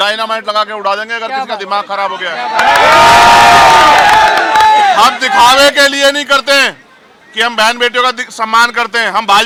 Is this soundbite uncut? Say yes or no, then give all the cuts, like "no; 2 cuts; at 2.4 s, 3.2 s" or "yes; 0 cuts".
yes; 0 cuts